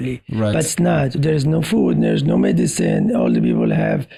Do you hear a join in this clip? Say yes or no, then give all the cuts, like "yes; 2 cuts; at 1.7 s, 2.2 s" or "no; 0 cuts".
no; 0 cuts